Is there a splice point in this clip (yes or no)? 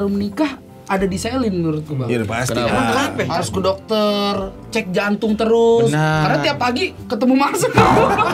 yes